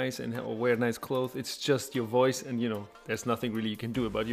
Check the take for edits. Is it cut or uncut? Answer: cut